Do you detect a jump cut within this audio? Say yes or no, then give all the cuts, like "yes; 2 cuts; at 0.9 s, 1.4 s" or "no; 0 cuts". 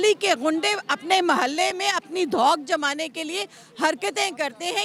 no; 0 cuts